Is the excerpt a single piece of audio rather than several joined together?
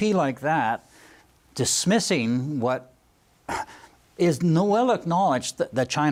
yes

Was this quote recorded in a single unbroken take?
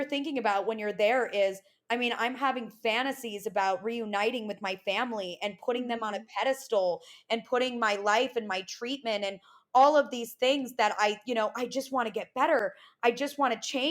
yes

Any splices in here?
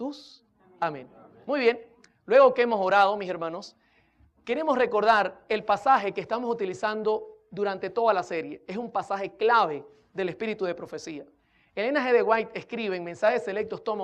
no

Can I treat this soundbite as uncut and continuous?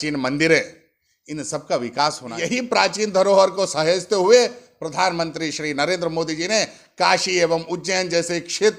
no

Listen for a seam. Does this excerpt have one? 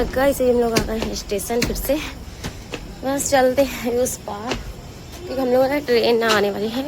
no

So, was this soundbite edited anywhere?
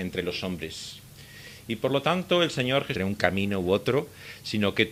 no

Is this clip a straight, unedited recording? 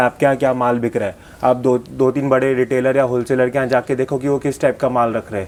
yes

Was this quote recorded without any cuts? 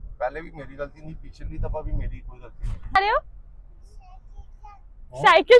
no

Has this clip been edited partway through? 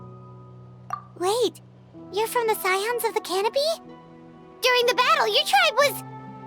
yes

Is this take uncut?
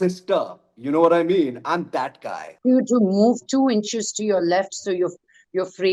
no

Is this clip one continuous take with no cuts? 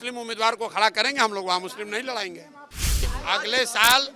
no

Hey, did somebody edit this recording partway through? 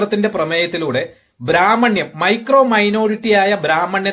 no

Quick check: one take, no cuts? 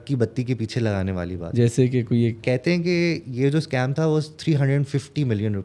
no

